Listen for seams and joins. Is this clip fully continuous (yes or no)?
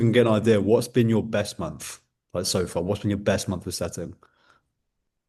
yes